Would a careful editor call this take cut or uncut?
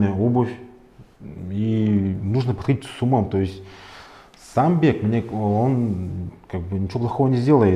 uncut